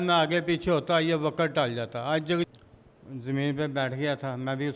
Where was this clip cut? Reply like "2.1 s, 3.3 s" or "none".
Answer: 2.5 s

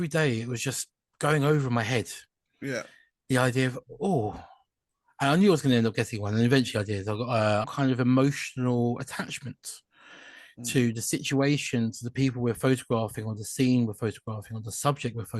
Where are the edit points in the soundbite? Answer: 7.7 s

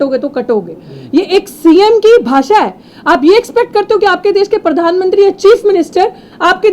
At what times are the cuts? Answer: none

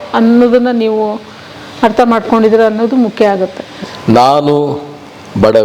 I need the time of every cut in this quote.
3.7 s

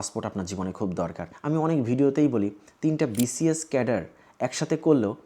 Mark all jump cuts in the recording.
1.3 s

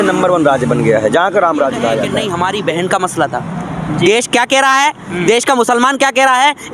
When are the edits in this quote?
2.2 s

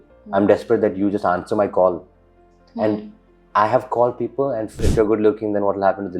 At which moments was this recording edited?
4.9 s

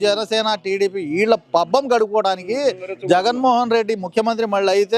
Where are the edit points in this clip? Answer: none

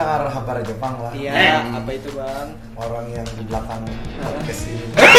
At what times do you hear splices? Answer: none

